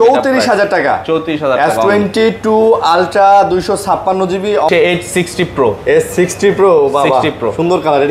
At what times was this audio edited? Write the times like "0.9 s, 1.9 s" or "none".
4.7 s